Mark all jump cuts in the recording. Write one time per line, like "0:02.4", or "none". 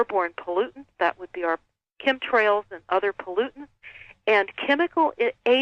0:04.5